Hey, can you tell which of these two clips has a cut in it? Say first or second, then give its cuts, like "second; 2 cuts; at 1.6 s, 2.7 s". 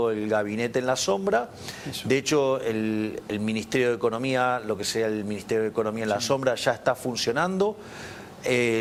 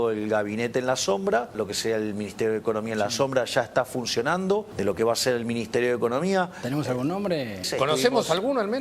second; 3 cuts; at 1.6 s, 4.7 s, 7.7 s